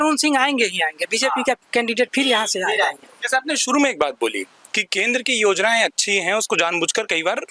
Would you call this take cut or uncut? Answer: uncut